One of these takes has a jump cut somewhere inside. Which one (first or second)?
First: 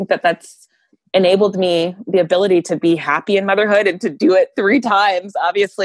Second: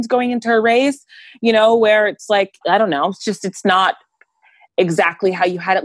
second